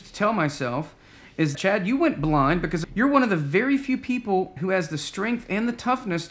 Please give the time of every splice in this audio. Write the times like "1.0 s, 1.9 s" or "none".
1.5 s, 2.8 s, 4.5 s